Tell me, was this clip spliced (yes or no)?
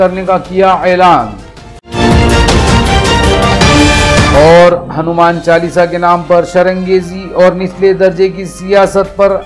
yes